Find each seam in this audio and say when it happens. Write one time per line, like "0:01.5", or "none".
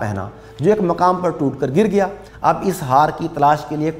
0:02.2